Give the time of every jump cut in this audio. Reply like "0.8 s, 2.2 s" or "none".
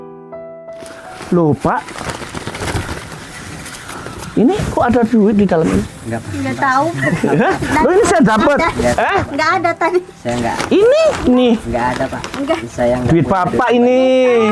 1.1 s